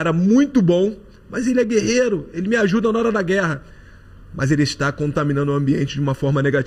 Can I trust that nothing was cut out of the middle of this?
yes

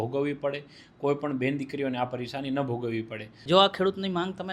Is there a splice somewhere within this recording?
yes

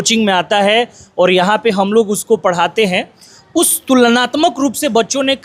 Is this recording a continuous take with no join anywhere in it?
yes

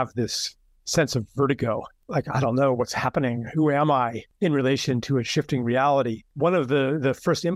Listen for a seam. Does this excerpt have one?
yes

